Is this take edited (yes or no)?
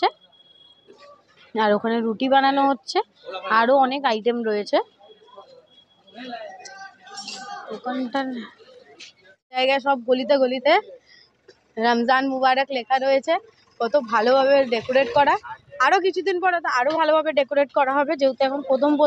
no